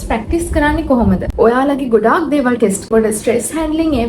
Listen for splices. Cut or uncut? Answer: cut